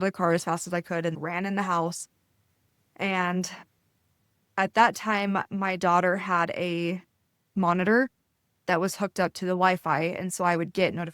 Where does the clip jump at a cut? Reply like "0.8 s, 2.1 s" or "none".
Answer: 1.2 s